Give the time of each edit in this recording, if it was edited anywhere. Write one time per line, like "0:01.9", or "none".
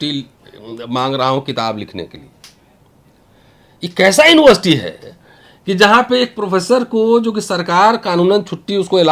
none

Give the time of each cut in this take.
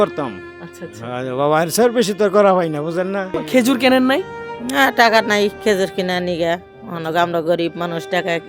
0:03.4

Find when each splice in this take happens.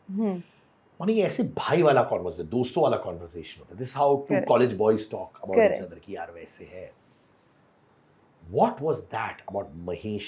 none

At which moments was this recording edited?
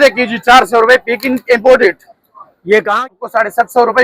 0:03.1

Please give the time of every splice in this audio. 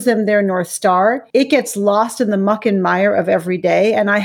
0:01.2

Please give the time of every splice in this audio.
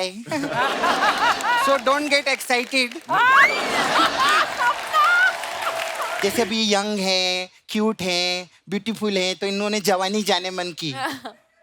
0:06.1

